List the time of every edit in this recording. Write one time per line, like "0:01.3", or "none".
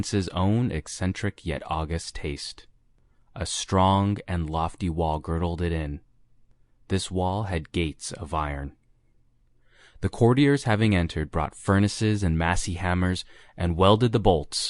0:07.7